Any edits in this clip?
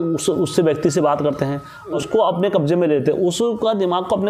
yes; 1 cut; at 2.0 s

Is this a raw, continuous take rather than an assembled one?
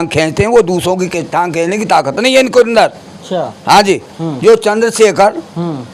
yes; 0 cuts

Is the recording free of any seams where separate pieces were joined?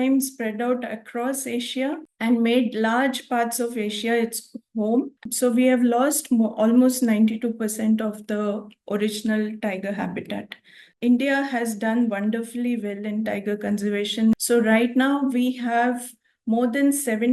no; 3 cuts; at 5.2 s, 10.9 s, 14.3 s

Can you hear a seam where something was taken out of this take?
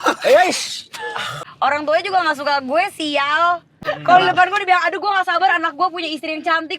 yes; 2 cuts; at 1.4 s, 3.8 s

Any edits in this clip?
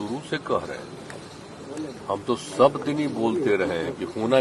no; 0 cuts

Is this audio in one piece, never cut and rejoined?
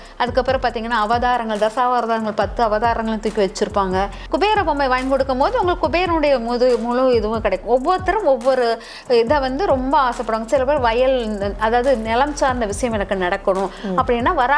no; 1 cut; at 4.2 s

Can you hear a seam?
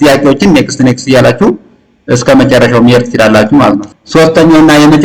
yes; 1 cut; at 3.9 s

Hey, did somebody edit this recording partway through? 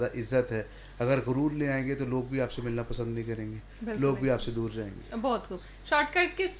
no; 0 cuts

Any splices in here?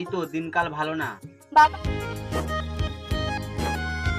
yes; 1 cut; at 1.7 s

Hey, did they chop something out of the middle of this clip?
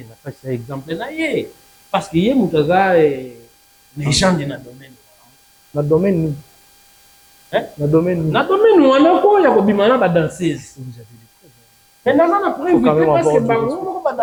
no; 0 cuts

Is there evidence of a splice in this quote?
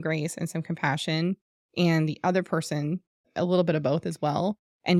no; 0 cuts

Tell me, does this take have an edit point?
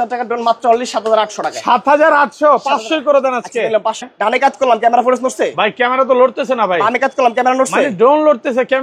yes; 1 cut; at 4.0 s

